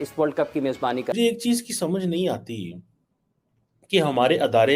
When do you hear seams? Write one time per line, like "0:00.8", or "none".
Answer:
0:01.1